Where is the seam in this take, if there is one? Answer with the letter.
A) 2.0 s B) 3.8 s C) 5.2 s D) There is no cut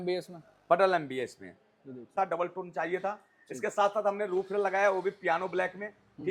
A